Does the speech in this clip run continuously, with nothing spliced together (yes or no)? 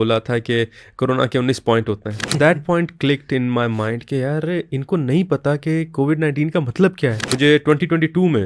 no